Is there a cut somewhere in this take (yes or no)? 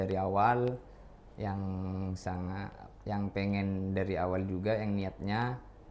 no